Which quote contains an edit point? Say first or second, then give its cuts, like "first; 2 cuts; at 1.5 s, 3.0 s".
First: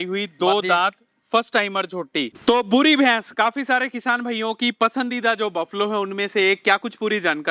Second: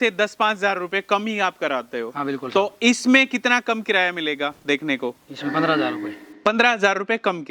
first; 1 cut; at 2.3 s